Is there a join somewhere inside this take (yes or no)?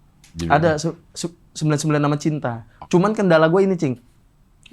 yes